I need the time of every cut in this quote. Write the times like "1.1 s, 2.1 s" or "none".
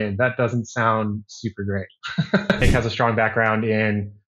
2.5 s